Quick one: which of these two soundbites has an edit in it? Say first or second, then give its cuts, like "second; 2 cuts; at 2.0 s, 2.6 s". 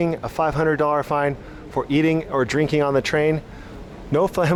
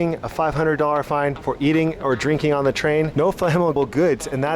second; 2 cuts; at 1.4 s, 3.7 s